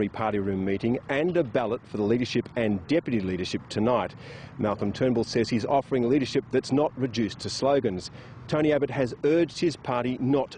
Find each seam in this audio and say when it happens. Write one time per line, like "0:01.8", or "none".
0:04.1

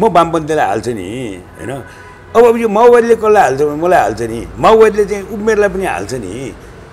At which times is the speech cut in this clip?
none

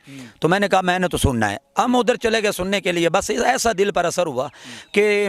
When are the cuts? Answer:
none

